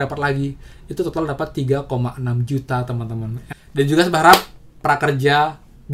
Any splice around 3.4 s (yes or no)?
yes